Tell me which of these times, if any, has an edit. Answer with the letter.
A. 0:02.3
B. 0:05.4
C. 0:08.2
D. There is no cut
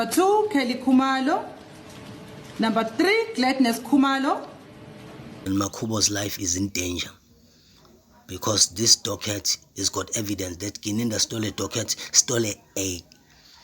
B